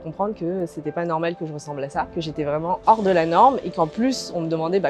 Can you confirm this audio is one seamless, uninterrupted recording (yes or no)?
no